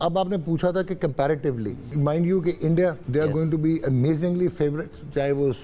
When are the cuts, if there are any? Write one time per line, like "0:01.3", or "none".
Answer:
0:01.9
0:03.0